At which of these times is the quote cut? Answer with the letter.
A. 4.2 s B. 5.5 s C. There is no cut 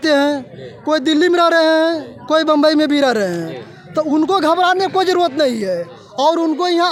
C